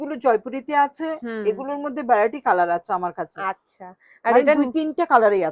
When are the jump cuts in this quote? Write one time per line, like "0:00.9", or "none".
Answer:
none